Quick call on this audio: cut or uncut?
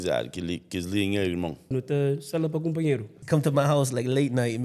cut